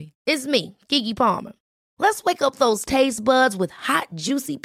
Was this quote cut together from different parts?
no; 0 cuts

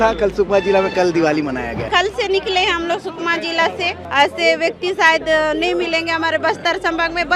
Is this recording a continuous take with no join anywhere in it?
no; 2 cuts; at 1.8 s, 4.0 s

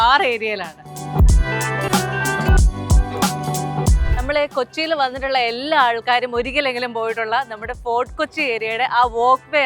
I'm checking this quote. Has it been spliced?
yes; 2 cuts; at 0.9 s, 4.0 s

